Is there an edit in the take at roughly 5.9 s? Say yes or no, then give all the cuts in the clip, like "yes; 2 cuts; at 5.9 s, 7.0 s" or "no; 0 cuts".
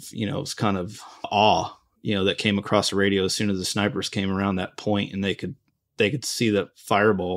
no; 1 cut; at 1.3 s